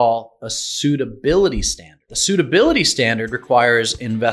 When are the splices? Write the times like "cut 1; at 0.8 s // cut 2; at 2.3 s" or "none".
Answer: cut 1; at 2.1 s